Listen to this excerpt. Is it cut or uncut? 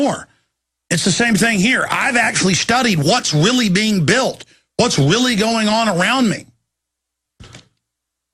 uncut